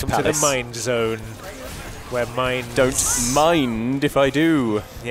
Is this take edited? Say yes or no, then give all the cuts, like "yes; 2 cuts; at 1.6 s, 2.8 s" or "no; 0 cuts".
no; 0 cuts